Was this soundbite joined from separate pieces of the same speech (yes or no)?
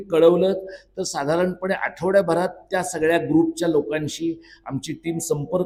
no